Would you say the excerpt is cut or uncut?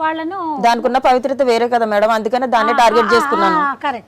uncut